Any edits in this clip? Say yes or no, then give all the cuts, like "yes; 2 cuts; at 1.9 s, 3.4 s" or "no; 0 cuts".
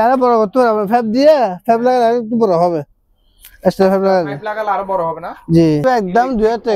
yes; 1 cut; at 5.8 s